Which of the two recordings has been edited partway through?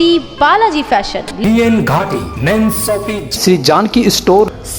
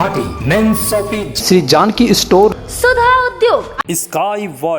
second; 1 cut; at 3.8 s

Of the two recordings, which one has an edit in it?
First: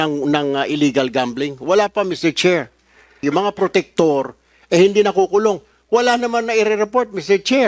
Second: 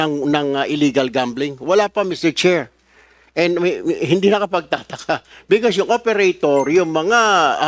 first; 1 cut; at 3.2 s

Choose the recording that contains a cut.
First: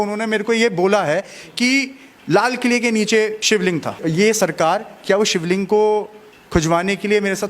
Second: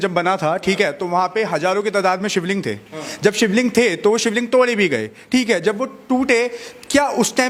first; 1 cut; at 4.0 s

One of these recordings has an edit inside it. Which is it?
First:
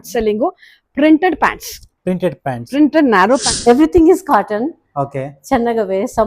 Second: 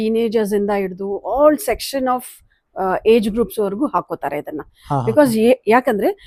first; 1 cut; at 3.5 s

